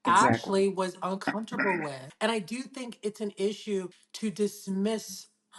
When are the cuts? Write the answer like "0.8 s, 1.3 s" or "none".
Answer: 2.0 s, 4.0 s